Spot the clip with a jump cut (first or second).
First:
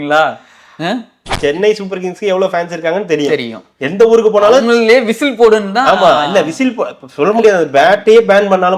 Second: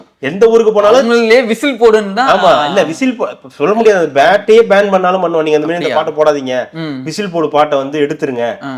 first